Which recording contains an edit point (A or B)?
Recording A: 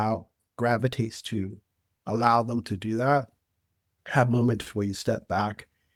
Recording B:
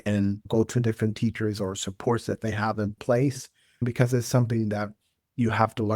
B